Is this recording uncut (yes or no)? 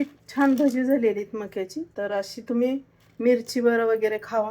no